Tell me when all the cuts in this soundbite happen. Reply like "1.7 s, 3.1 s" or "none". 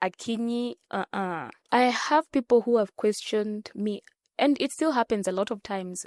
1.6 s